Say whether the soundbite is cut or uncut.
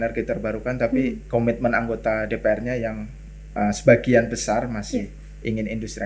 uncut